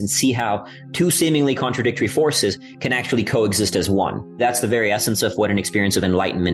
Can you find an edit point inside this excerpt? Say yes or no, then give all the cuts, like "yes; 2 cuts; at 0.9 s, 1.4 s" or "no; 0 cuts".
yes; 1 cut; at 4.4 s